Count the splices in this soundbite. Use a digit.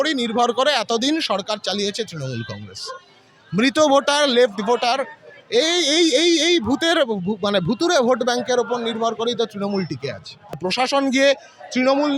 1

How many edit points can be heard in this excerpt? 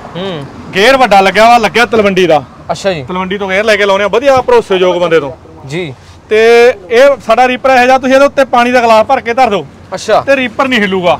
0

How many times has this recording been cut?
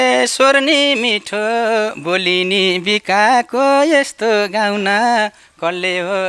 0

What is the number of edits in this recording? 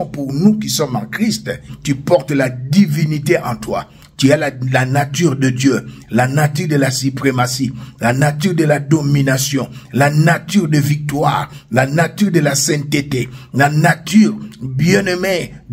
1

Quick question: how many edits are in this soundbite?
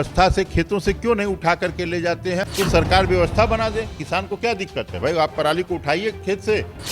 1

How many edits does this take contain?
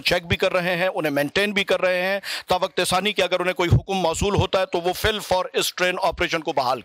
0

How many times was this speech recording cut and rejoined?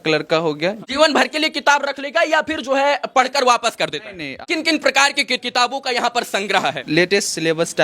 4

